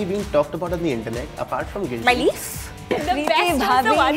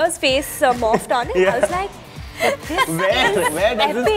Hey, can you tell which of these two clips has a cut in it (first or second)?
first